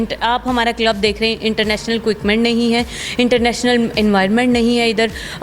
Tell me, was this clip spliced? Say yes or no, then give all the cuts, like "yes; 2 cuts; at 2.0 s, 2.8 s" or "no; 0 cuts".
no; 0 cuts